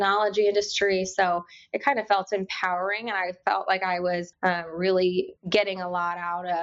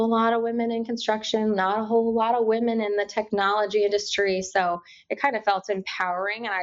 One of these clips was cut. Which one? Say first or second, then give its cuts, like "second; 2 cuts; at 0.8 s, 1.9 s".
first; 2 cuts; at 4.3 s, 5.4 s